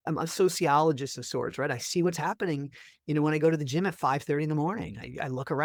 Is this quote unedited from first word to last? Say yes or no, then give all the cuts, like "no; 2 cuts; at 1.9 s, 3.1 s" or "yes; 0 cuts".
yes; 0 cuts